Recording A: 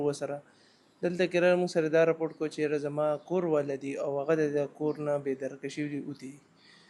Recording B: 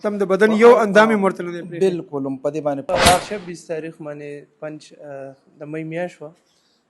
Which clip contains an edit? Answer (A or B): B